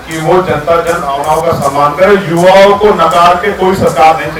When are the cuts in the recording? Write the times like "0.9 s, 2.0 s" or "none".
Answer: none